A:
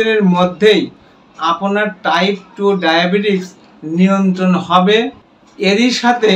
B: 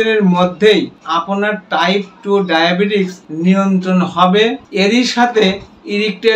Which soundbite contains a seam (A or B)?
B